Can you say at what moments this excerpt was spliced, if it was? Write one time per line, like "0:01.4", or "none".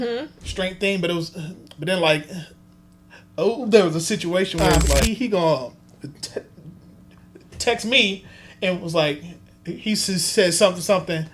0:05.0